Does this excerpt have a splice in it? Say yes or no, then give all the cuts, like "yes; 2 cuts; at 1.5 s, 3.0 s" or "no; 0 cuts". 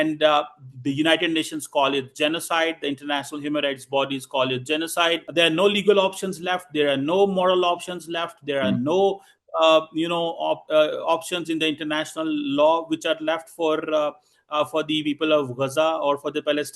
yes; 1 cut; at 5.2 s